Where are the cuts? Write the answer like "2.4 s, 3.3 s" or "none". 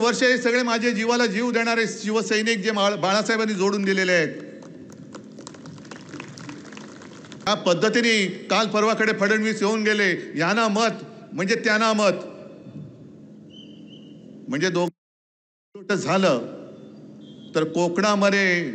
7.5 s